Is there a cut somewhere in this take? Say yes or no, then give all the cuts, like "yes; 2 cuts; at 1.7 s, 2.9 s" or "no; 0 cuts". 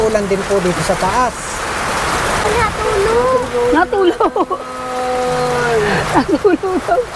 yes; 1 cut; at 2.4 s